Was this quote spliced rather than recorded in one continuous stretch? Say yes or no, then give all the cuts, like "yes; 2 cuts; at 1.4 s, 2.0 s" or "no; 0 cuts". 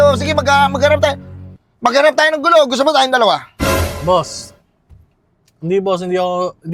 no; 0 cuts